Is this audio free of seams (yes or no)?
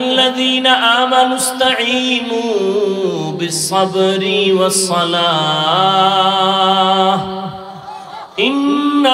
yes